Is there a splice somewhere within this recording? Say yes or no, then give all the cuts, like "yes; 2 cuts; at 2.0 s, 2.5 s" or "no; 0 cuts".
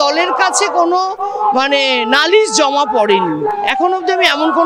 no; 0 cuts